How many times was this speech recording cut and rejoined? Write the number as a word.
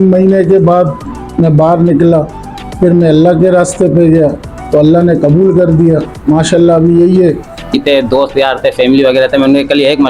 one